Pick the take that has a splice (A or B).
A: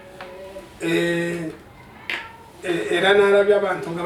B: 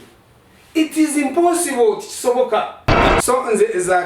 B